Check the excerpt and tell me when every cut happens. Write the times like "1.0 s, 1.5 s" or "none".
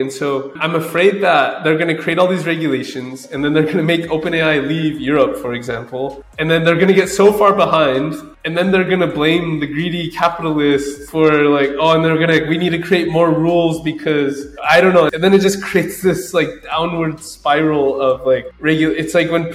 11.0 s, 14.5 s